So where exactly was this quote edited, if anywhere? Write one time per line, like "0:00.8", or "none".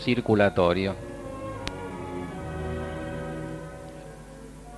0:03.1